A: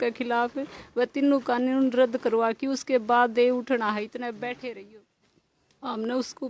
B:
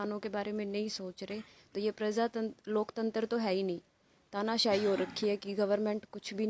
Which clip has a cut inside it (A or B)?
A